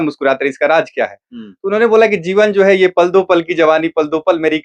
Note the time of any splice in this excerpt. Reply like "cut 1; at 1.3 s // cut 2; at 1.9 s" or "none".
none